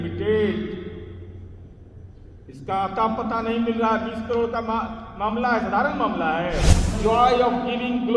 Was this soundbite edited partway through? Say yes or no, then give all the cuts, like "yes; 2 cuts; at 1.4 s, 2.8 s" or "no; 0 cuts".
yes; 1 cut; at 7.0 s